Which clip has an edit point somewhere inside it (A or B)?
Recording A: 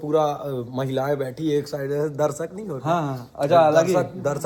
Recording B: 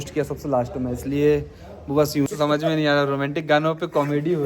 B